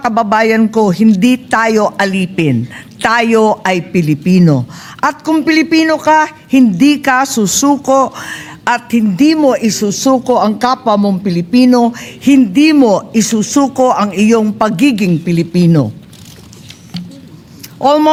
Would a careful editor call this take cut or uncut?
uncut